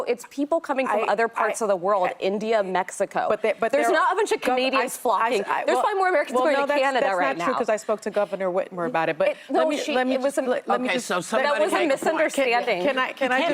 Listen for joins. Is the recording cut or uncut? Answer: uncut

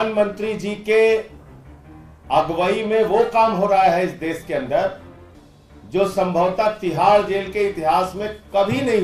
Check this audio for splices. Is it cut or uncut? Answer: uncut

